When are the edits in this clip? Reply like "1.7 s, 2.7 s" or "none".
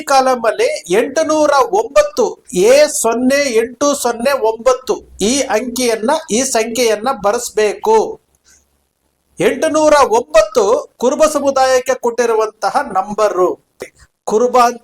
13.9 s